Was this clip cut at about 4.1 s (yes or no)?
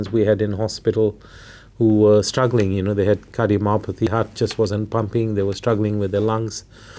yes